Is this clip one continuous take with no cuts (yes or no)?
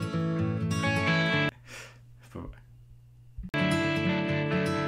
yes